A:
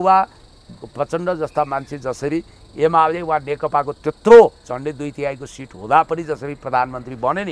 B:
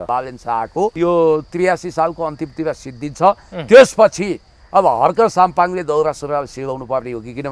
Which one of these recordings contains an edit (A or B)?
B